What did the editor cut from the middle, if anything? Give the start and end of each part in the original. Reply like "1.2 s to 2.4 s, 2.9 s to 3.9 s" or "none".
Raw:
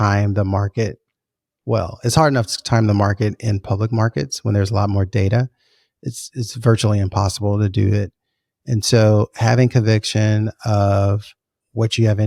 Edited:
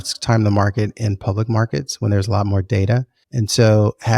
5.6 s to 8.5 s